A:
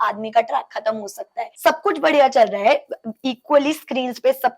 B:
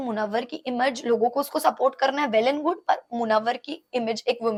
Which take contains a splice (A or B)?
A